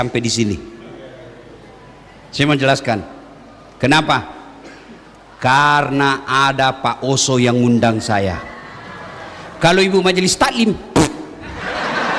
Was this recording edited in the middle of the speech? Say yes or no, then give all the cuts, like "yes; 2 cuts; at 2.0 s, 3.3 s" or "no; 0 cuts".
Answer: no; 0 cuts